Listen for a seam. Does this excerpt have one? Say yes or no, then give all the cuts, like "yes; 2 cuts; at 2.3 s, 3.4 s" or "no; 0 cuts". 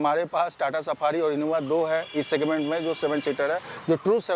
no; 0 cuts